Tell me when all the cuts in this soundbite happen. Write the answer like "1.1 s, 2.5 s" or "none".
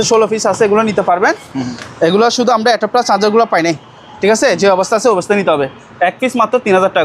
none